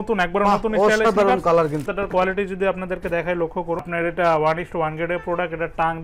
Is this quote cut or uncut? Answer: cut